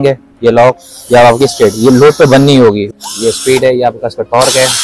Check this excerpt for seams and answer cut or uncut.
cut